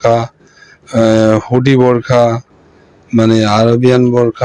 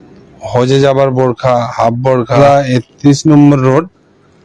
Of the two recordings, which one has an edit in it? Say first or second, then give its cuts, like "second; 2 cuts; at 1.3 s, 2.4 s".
second; 1 cut; at 2.4 s